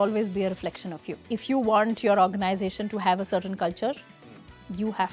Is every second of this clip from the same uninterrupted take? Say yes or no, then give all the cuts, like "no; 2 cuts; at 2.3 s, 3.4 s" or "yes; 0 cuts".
no; 1 cut; at 1.1 s